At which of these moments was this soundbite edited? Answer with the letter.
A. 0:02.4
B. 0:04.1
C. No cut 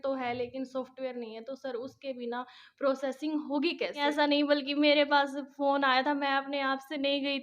B